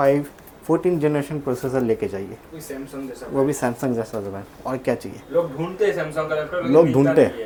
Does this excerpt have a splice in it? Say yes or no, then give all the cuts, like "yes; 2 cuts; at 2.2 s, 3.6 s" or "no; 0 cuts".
no; 0 cuts